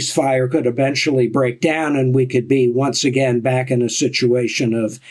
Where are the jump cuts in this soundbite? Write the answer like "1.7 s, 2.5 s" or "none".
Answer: none